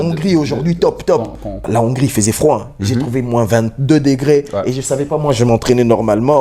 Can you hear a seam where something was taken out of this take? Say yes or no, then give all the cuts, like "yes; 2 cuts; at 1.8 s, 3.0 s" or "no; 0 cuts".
yes; 1 cut; at 1.6 s